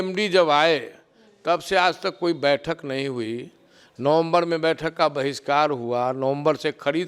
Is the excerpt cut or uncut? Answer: uncut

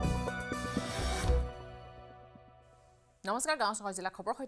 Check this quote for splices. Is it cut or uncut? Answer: uncut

